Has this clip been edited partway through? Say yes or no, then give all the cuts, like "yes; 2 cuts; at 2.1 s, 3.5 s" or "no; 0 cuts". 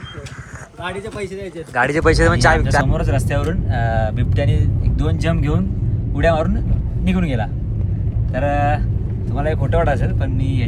yes; 1 cut; at 2.8 s